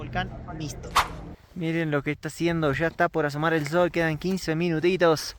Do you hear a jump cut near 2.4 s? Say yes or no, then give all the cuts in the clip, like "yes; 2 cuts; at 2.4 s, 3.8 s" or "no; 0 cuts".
no; 1 cut; at 1.1 s